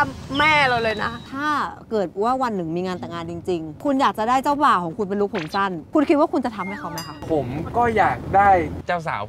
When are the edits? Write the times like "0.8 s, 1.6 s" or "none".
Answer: 1.2 s, 3.8 s, 5.8 s, 6.6 s